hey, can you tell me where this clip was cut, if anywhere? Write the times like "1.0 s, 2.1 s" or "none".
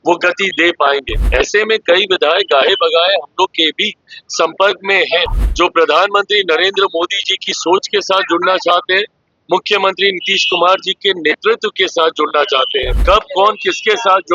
1.2 s, 5.4 s, 12.9 s